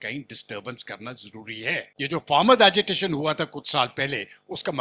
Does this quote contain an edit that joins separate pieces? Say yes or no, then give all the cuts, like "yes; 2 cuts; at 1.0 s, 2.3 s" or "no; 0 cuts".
yes; 1 cut; at 1.9 s